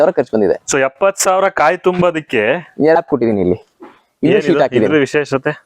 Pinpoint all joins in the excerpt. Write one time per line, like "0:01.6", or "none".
0:03.0